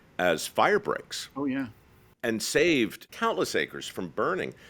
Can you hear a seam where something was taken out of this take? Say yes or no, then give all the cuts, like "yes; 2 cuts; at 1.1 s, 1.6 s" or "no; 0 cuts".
yes; 1 cut; at 3.1 s